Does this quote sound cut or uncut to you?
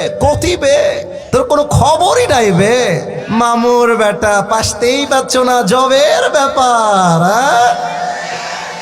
cut